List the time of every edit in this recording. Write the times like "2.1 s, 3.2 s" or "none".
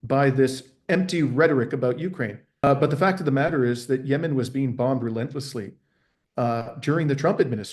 2.6 s